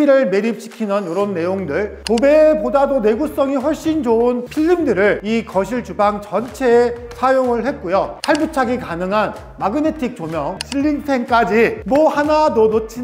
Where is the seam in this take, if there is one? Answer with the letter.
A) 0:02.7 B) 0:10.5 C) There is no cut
B